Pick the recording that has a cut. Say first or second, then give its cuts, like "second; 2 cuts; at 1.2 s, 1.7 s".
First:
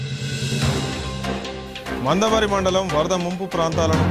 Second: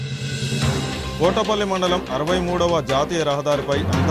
first; 1 cut; at 1.0 s